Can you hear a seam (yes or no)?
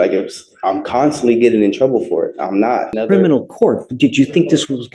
yes